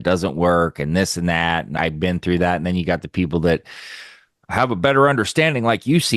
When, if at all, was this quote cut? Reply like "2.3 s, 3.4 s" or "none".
1.7 s